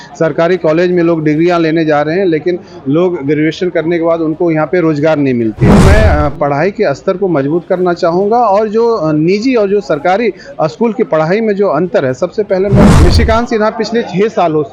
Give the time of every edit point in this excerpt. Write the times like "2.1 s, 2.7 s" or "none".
5.7 s, 12.8 s

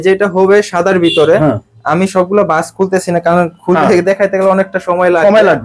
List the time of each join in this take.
none

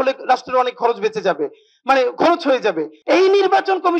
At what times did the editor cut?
2.9 s

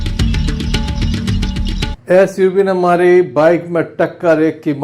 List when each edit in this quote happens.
0.9 s, 2.0 s

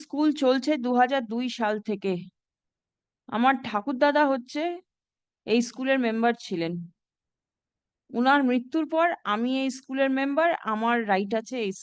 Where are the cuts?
none

